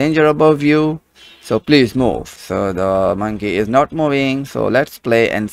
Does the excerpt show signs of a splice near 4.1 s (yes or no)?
no